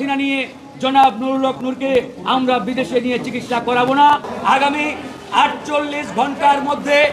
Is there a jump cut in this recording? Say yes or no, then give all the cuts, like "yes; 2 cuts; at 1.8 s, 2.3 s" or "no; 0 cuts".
yes; 1 cut; at 4.3 s